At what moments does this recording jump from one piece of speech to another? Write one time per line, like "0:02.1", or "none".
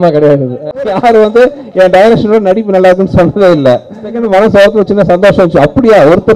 0:00.9
0:04.1